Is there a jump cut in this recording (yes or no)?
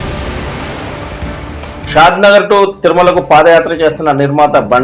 no